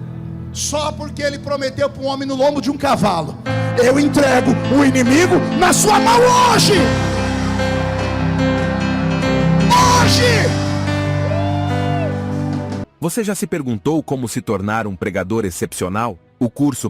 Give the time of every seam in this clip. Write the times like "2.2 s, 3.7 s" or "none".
12.8 s